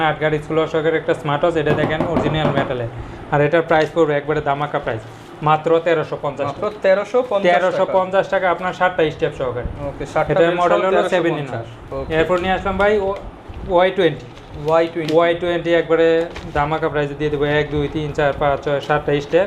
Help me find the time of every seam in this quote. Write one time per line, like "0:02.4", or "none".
none